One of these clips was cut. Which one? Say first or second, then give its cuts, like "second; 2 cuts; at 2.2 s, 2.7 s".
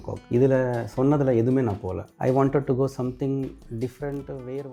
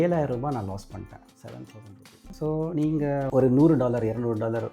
second; 1 cut; at 2.3 s